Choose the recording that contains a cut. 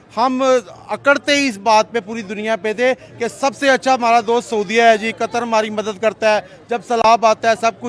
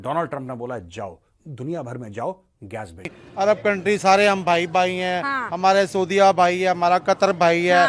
second; 1 cut; at 3.2 s

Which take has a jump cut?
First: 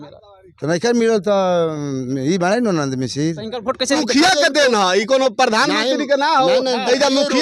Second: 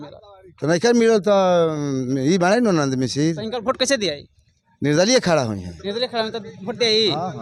first; 1 cut; at 4.0 s

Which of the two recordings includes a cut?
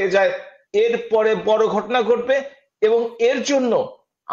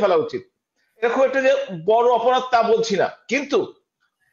second; 1 cut; at 1.0 s

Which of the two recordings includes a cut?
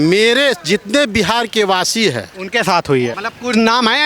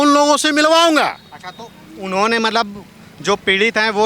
first; 1 cut; at 3.2 s

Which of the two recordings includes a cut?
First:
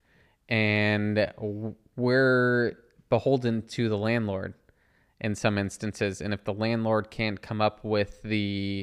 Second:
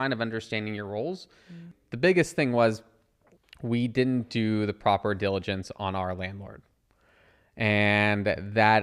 second; 1 cut; at 1.7 s

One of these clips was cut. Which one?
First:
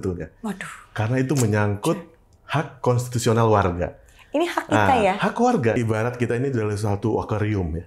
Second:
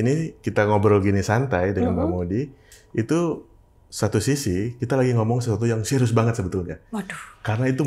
first; 1 cut; at 5.7 s

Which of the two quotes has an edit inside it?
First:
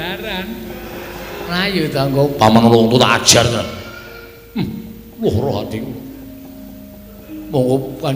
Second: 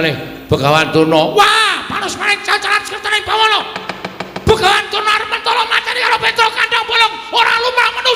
first; 1 cut; at 1.5 s

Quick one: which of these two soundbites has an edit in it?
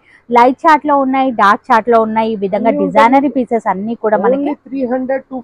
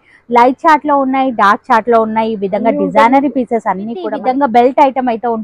second; 1 cut; at 4.1 s

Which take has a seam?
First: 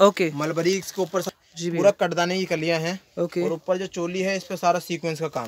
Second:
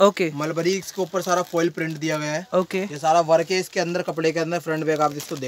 first; 1 cut; at 1.3 s

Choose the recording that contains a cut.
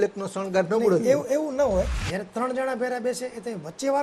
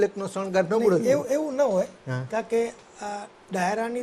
first; 1 cut; at 2.0 s

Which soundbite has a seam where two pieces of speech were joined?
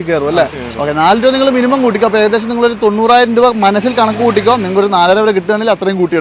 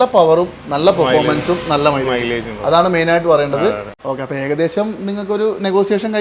second; 1 cut; at 3.9 s

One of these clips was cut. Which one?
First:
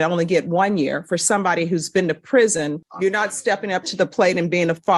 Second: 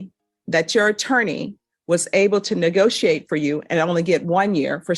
first; 1 cut; at 2.8 s

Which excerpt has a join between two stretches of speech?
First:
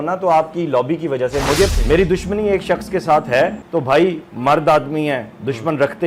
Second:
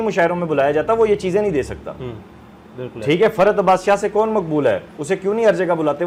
first; 2 cuts; at 1.7 s, 3.6 s

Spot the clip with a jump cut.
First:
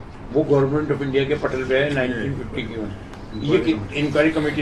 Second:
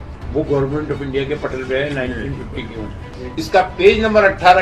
second; 1 cut; at 3.1 s

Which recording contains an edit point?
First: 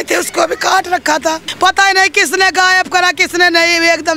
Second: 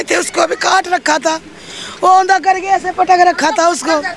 first; 1 cut; at 1.5 s

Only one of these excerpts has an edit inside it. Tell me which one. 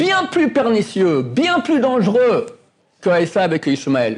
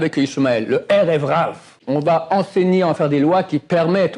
second; 1 cut; at 1.8 s

